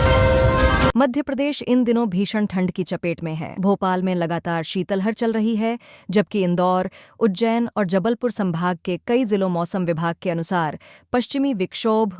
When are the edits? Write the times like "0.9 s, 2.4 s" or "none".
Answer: 0.9 s